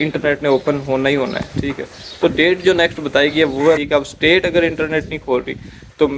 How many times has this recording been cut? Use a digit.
1